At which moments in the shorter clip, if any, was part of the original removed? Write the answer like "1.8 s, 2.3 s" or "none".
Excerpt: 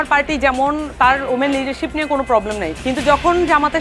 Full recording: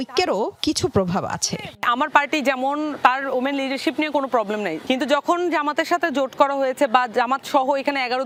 none